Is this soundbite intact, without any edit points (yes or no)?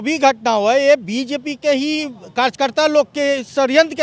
yes